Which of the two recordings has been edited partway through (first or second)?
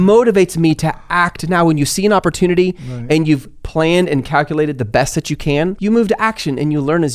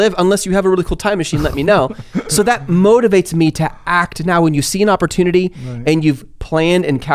first